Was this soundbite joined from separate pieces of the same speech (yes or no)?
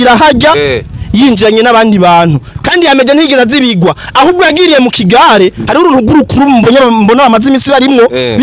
no